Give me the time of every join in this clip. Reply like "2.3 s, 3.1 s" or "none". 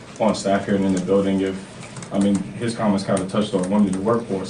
none